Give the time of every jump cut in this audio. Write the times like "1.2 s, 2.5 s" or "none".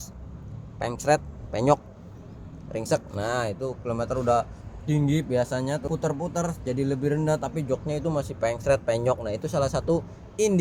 5.8 s